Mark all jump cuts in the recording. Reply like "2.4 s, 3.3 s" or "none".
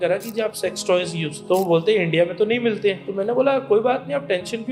1.3 s, 3.0 s